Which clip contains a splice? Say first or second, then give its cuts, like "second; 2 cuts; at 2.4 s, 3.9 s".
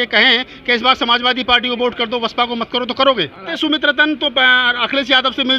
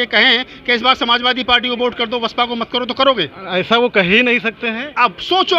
first; 1 cut; at 3.5 s